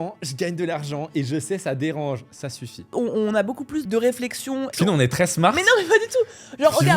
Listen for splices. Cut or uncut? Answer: cut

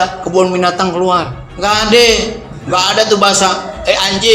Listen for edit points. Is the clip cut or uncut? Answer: cut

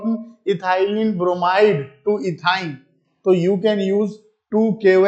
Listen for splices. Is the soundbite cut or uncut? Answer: uncut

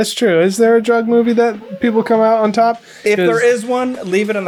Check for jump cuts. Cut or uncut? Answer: uncut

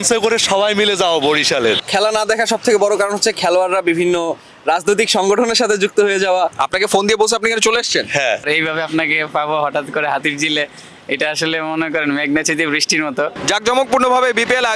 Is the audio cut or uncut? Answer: cut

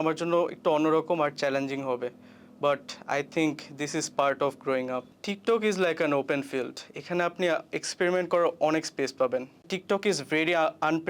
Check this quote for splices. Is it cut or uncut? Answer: cut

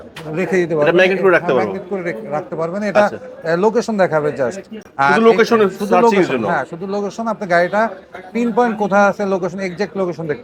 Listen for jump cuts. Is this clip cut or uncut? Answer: uncut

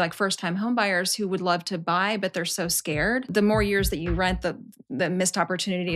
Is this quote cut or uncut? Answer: cut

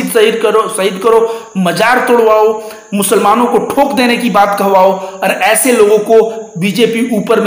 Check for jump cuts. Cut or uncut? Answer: uncut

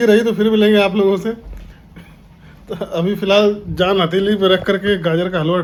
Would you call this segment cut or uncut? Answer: uncut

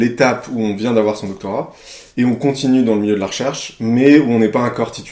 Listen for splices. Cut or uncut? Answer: uncut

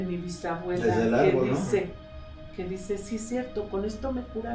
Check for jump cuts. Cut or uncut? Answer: uncut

